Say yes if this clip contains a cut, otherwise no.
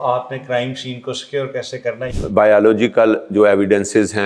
yes